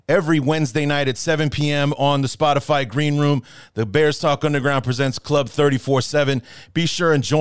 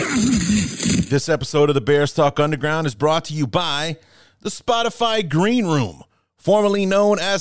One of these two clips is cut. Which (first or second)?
second